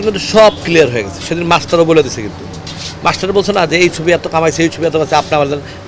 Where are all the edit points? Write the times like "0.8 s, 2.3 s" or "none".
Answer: none